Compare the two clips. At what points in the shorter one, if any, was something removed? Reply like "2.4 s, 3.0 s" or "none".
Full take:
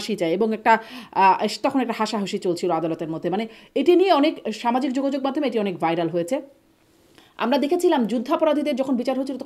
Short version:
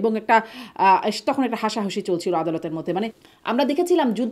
3.2 s